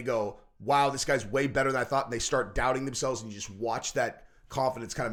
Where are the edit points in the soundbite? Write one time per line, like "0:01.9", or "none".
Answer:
none